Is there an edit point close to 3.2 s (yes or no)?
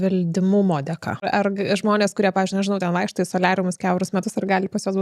no